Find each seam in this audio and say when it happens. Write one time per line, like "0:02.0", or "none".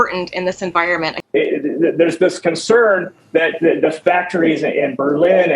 0:01.2